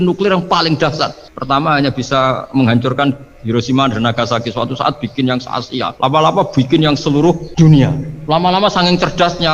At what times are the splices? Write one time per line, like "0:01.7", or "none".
0:05.9
0:07.5
0:08.1